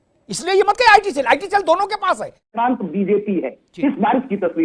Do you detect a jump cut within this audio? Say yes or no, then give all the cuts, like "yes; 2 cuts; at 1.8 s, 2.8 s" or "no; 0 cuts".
yes; 1 cut; at 2.5 s